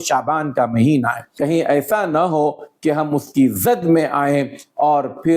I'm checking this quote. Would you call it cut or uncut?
cut